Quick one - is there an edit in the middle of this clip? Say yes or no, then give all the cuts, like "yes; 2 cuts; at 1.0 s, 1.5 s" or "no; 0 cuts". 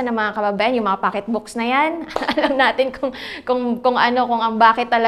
no; 0 cuts